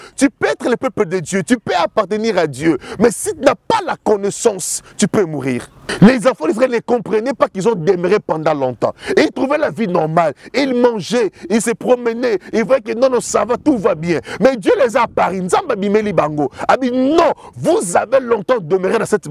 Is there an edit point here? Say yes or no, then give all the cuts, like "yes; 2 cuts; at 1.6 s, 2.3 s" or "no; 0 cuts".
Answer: yes; 1 cut; at 5.8 s